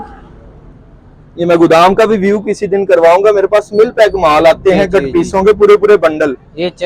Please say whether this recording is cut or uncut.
uncut